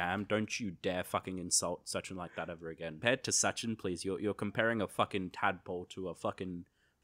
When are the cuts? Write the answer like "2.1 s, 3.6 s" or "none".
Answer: 3.0 s